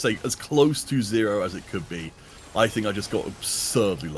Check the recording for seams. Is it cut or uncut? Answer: uncut